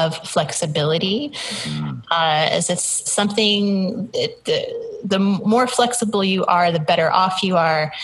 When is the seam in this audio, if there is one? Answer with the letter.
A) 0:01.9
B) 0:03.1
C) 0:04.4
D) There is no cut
D